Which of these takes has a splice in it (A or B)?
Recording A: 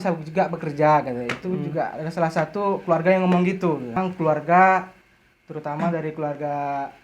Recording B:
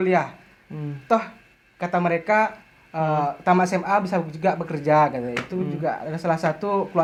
A